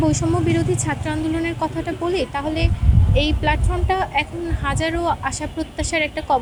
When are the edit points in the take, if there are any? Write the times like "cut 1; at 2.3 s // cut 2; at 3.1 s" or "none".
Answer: none